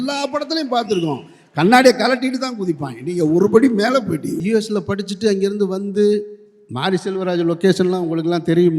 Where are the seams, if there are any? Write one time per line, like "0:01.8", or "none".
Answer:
0:04.4